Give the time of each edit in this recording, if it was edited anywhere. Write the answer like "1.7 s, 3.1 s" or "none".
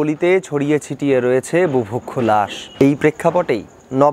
2.6 s